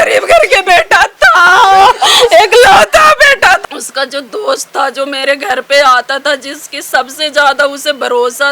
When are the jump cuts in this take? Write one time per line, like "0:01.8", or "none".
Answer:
0:03.6

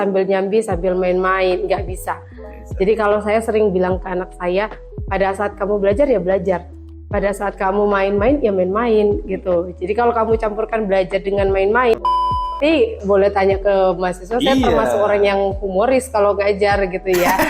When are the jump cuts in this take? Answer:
0:12.5

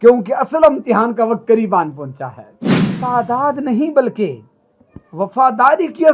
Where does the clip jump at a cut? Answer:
0:03.0

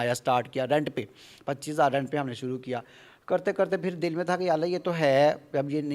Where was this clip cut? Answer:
none

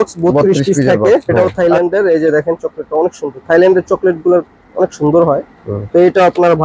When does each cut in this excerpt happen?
0:01.3

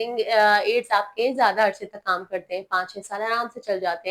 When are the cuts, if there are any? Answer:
none

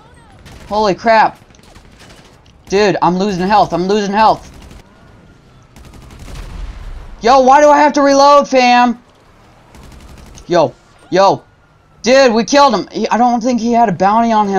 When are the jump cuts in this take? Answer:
0:04.7

